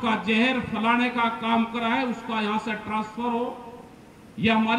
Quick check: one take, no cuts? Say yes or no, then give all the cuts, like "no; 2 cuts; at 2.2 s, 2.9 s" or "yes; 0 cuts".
yes; 0 cuts